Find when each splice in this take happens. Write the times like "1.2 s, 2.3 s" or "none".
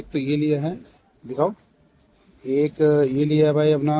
none